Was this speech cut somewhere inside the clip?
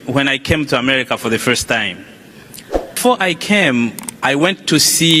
yes; 1 cut; at 3.0 s

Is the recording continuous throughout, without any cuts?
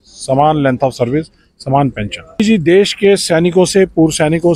no; 1 cut; at 2.4 s

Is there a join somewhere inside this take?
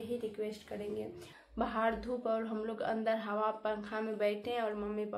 yes; 1 cut; at 1.3 s

